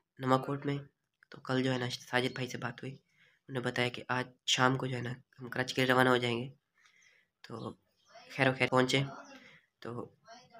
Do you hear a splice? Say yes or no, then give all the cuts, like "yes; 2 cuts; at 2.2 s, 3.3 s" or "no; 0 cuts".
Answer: yes; 1 cut; at 8.7 s